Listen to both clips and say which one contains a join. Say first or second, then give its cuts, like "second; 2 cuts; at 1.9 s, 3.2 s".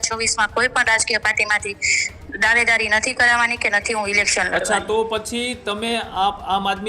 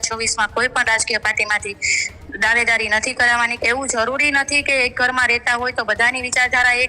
second; 1 cut; at 3.5 s